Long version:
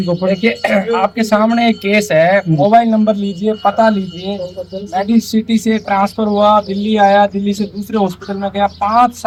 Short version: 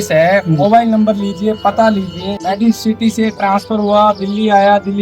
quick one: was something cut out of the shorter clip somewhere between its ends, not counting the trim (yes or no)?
yes